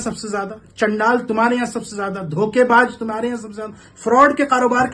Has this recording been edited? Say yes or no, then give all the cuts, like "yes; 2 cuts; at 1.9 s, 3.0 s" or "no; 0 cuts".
no; 0 cuts